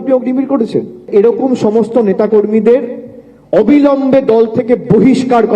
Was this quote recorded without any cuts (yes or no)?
no